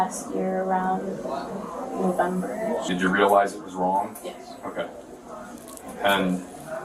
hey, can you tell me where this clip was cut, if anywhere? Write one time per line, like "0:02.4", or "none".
0:02.9